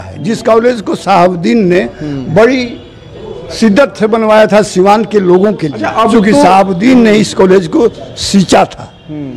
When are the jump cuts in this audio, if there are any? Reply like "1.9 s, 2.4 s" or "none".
5.8 s